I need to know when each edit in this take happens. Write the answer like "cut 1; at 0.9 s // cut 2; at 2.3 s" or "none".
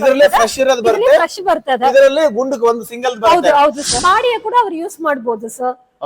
cut 1; at 3.9 s